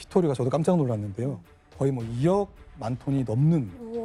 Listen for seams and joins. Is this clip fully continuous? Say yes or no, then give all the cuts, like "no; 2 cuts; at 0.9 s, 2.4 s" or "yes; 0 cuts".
yes; 0 cuts